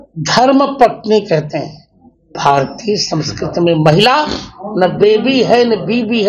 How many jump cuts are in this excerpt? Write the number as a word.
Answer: one